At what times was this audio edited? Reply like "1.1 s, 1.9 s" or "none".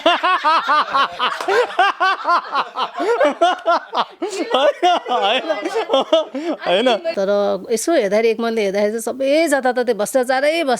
7.1 s